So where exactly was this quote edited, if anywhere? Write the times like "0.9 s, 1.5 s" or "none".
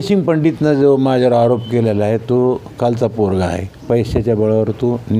none

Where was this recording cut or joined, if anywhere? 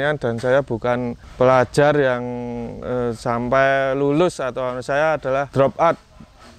1.2 s, 5.5 s

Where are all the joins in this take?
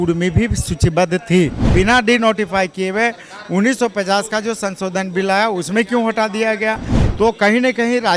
1.7 s

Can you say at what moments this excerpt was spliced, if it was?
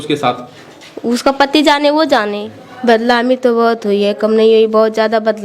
2.5 s

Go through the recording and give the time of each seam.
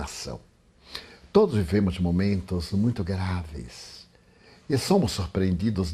4.9 s

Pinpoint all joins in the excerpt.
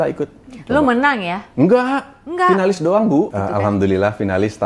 3.4 s

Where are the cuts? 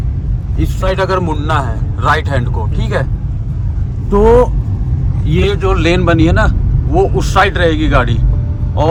none

